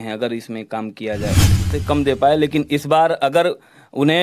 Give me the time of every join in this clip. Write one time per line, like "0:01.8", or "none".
0:01.7